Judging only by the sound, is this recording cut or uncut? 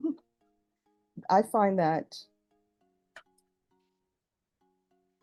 uncut